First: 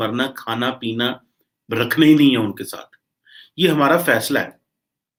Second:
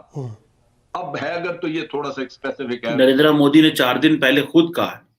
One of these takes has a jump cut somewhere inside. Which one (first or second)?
second